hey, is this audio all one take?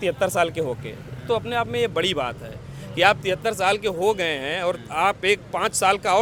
yes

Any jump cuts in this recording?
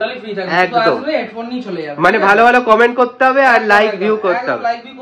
no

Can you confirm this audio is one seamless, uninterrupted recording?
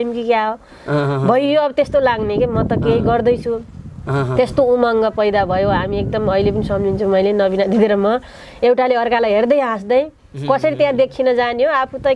yes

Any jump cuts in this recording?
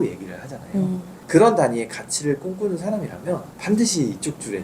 yes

